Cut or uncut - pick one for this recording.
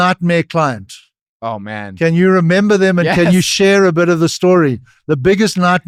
uncut